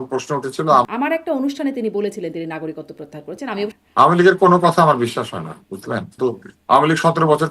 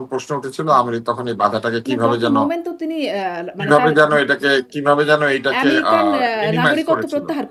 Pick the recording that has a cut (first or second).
first